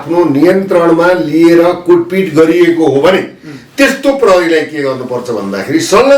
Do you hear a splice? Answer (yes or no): no